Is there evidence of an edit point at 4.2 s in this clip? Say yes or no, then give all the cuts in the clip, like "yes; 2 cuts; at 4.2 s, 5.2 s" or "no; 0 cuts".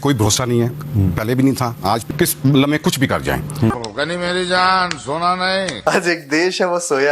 no; 2 cuts; at 2.0 s, 5.7 s